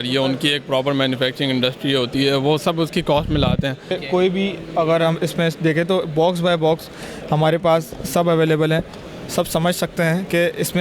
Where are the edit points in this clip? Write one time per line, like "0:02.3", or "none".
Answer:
0:03.9